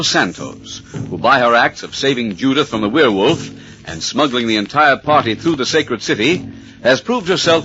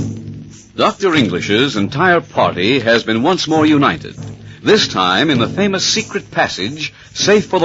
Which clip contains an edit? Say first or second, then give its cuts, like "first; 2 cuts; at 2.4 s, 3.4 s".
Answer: second; 1 cut; at 1.4 s